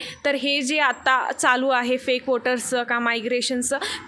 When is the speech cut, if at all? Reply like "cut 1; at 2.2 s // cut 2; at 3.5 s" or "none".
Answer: none